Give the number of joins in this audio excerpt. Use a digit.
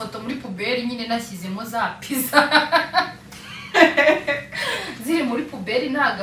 0